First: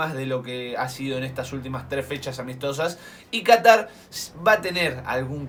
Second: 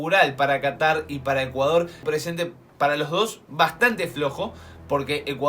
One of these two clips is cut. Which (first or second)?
second